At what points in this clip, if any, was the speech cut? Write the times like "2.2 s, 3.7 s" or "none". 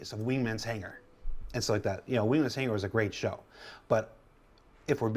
none